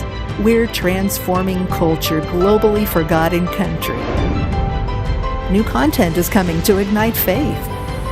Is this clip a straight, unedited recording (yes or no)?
yes